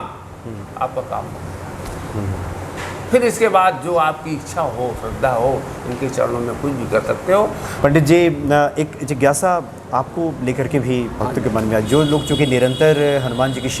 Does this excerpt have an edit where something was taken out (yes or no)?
yes